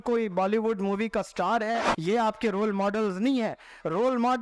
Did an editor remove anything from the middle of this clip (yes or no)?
yes